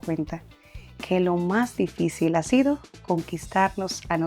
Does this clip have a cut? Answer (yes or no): no